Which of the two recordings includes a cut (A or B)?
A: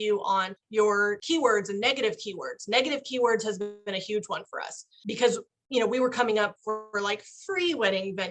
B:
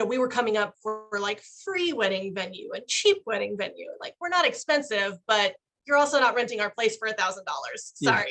A